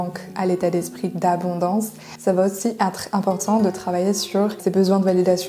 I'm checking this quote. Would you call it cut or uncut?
cut